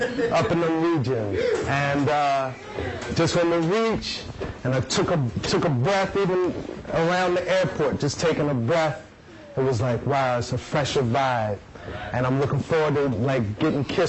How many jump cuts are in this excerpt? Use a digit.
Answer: 0